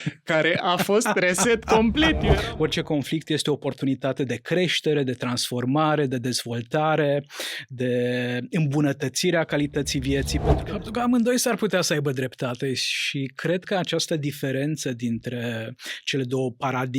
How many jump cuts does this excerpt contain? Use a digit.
2